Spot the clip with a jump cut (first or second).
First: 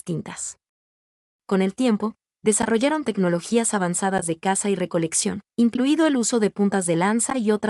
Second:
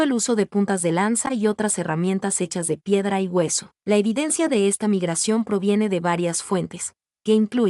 second